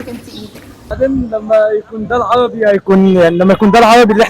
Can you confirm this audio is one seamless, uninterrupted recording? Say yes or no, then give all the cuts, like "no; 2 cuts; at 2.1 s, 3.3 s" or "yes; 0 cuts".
no; 1 cut; at 0.9 s